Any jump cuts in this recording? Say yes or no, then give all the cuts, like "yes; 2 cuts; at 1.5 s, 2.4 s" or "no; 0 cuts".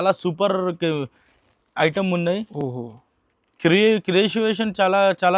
no; 0 cuts